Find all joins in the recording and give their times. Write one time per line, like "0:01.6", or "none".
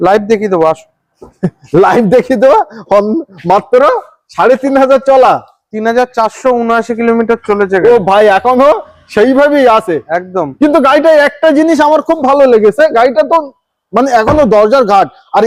none